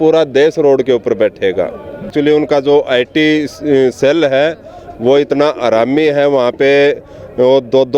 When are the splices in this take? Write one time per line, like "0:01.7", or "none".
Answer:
0:02.1